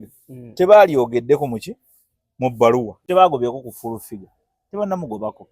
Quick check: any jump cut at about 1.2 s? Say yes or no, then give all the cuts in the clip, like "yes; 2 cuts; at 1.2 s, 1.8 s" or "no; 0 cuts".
no; 1 cut; at 3.0 s